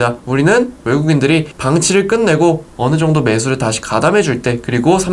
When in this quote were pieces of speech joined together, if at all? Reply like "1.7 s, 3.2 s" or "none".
1.5 s